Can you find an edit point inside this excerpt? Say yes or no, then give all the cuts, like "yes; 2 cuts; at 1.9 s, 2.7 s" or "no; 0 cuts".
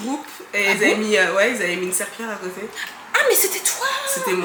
no; 0 cuts